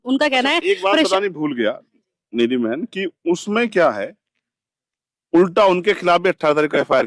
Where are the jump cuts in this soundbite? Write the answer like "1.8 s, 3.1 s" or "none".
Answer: none